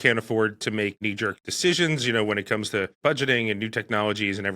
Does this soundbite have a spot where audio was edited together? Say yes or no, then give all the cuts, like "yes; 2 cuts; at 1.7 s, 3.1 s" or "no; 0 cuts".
yes; 1 cut; at 1.2 s